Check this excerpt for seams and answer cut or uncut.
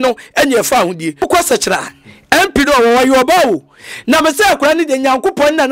cut